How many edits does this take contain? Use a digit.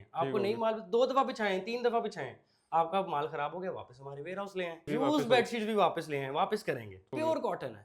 2